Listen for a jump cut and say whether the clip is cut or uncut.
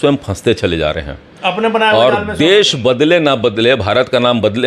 uncut